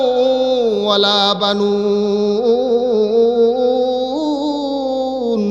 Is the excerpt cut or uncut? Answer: uncut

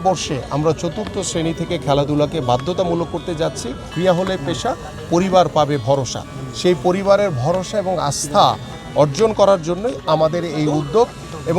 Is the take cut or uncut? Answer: cut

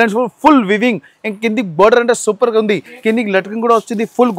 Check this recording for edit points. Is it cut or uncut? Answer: cut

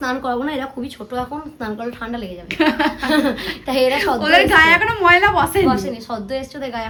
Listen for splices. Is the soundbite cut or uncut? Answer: uncut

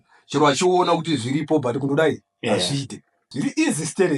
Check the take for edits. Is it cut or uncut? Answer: cut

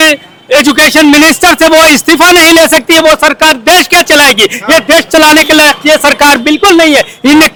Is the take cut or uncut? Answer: uncut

